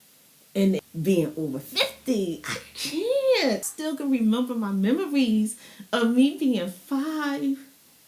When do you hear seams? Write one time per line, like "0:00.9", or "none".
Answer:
0:00.8
0:03.7